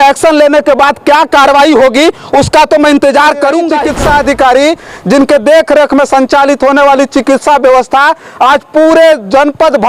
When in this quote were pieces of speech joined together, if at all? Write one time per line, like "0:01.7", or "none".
0:03.8